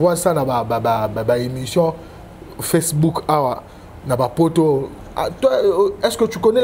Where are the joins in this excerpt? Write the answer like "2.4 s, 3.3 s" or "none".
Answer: none